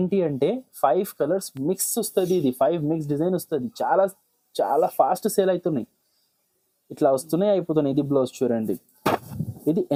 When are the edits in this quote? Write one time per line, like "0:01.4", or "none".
none

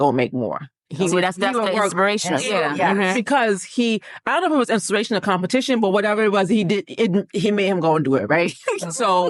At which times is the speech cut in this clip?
none

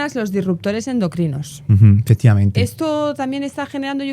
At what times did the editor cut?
none

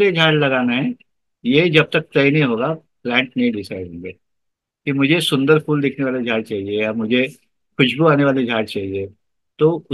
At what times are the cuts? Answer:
none

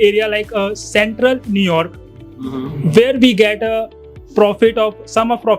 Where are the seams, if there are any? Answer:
none

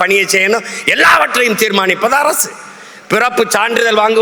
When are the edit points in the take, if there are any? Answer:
none

